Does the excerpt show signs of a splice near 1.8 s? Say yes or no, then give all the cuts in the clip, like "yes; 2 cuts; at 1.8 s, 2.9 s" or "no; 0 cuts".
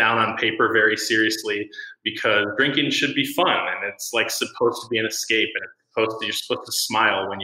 no; 0 cuts